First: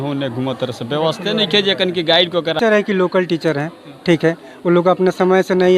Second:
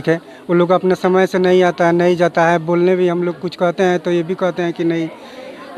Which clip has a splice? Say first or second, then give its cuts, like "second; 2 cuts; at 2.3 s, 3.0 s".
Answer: first; 1 cut; at 2.6 s